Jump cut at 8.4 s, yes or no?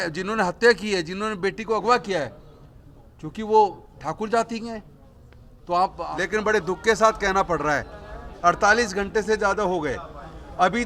no